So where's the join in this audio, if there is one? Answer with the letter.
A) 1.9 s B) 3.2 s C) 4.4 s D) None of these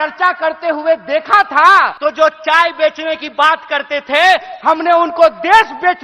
A